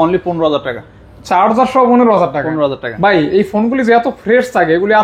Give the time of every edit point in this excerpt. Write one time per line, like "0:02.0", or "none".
0:02.9